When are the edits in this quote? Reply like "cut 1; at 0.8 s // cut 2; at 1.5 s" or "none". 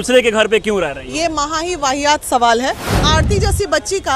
cut 1; at 3.0 s